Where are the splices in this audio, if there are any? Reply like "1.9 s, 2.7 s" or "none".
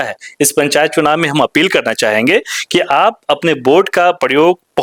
none